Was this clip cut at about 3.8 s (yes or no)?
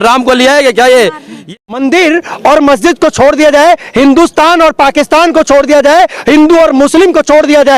no